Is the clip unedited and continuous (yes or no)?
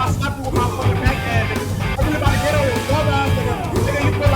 no